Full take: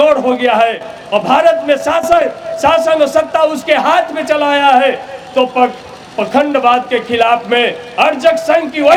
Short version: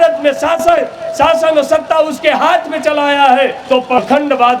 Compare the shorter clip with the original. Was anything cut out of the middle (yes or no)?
yes